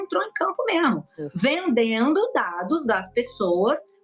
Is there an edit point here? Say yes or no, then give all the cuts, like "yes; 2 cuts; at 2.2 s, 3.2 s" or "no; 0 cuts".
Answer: no; 0 cuts